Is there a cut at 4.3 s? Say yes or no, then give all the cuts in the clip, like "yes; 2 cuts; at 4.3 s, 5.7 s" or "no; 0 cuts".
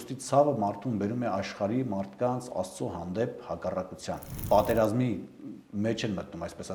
yes; 1 cut; at 4.3 s